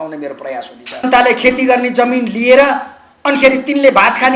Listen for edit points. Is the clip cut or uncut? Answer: cut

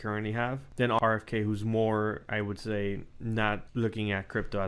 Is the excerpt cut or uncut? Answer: cut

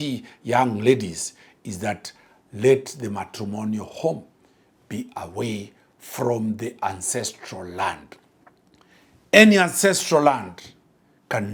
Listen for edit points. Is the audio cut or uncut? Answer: uncut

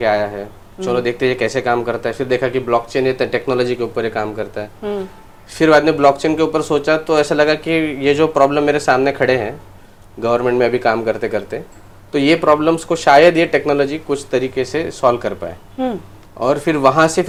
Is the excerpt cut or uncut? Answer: uncut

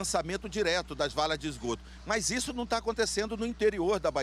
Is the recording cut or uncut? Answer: uncut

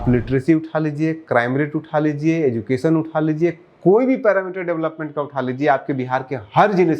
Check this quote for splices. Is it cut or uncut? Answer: uncut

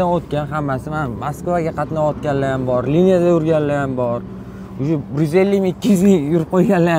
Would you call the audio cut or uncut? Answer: uncut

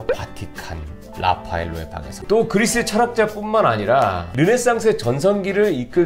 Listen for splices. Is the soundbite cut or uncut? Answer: cut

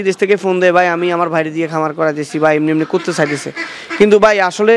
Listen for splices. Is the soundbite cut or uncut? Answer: uncut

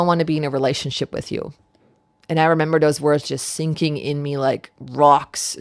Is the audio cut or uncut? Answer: uncut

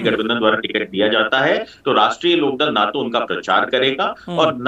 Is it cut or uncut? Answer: uncut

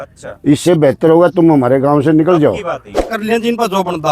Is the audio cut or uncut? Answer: cut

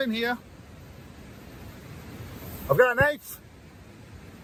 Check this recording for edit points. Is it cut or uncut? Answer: uncut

